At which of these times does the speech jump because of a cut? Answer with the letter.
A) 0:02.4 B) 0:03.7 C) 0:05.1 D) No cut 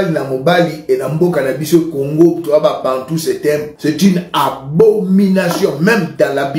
B